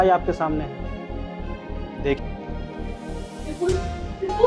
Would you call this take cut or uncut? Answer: cut